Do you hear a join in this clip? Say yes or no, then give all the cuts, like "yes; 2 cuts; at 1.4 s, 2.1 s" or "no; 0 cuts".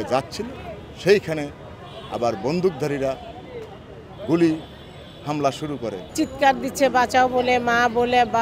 yes; 1 cut; at 6.0 s